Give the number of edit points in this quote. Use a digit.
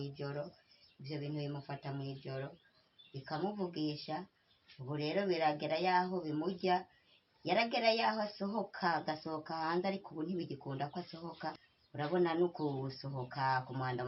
1